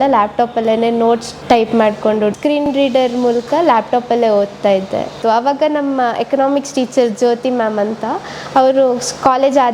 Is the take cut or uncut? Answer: cut